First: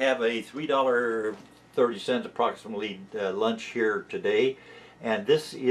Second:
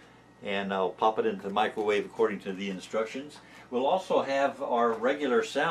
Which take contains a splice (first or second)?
first